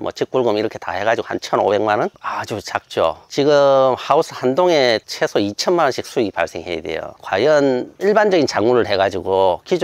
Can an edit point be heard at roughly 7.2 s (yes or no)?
yes